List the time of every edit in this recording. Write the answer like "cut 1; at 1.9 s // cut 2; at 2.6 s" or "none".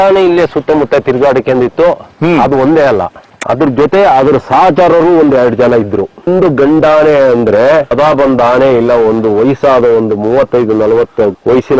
cut 1; at 6.3 s // cut 2; at 7.9 s